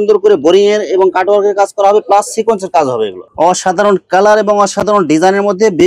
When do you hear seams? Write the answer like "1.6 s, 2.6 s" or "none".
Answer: 3.2 s